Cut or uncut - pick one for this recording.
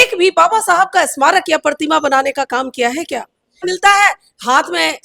cut